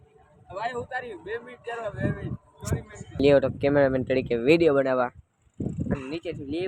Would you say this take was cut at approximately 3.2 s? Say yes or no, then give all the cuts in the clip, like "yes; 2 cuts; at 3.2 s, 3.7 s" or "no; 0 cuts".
yes; 1 cut; at 3.2 s